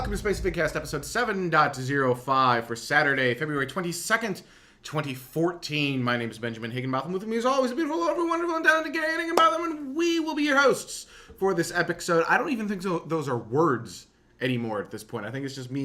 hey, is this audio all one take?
no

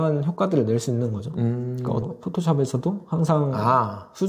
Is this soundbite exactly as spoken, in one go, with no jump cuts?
no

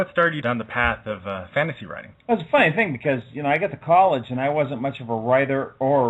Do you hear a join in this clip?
yes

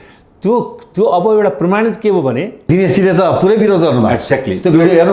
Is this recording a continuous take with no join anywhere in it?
no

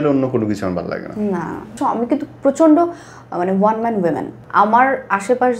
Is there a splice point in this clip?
yes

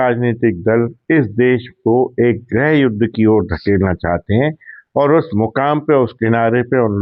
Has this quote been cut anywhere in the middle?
no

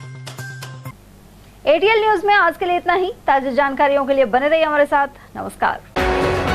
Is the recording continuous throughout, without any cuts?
yes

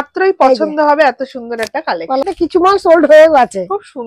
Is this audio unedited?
no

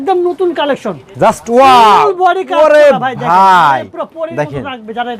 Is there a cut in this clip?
no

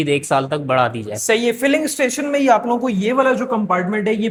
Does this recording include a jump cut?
no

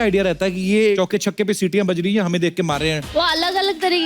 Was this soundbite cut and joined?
yes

